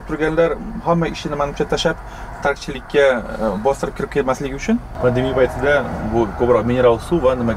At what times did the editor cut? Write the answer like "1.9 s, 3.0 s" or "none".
4.9 s